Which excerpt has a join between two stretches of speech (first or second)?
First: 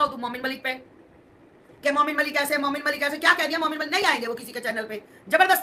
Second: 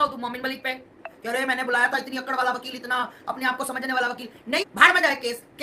second